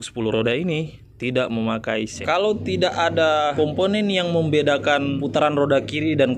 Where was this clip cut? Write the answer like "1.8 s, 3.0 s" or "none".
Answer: 2.2 s, 3.5 s, 5.2 s